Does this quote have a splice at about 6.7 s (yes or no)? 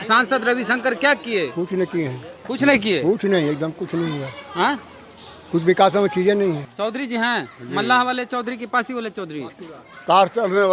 yes